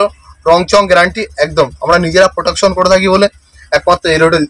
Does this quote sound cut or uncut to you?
uncut